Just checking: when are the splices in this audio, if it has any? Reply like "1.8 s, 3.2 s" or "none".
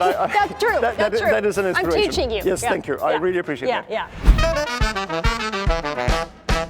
4.2 s